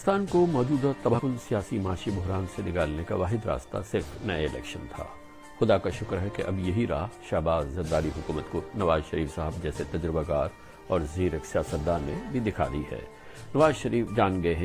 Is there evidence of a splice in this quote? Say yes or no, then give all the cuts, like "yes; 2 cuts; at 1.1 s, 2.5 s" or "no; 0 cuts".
yes; 1 cut; at 1.2 s